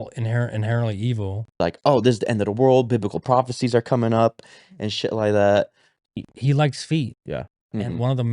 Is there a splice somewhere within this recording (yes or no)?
yes